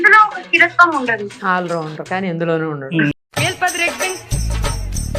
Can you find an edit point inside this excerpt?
yes; 2 cuts; at 1.3 s, 3.1 s

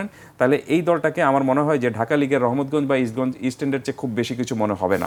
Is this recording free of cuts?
yes; 0 cuts

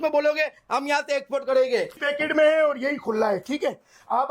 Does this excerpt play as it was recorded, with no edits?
no; 1 cut; at 2.0 s

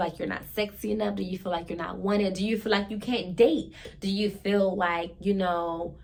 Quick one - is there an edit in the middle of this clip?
no; 0 cuts

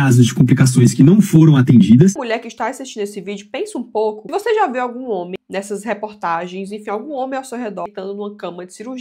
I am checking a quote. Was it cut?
yes; 3 cuts; at 2.2 s, 4.3 s, 7.9 s

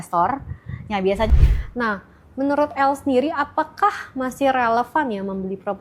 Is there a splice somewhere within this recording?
yes; 1 cut; at 1.3 s

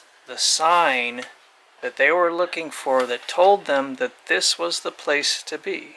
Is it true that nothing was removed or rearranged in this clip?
yes; 0 cuts

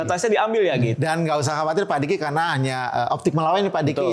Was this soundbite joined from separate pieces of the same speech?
yes; 1 cut; at 0.9 s

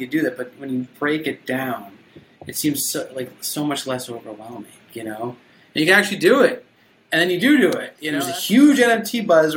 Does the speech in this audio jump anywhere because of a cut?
yes; 1 cut; at 8.0 s

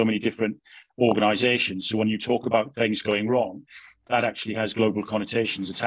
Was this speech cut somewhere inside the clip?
no; 0 cuts

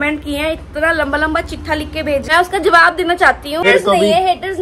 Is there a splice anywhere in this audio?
yes; 2 cuts; at 2.2 s, 3.6 s

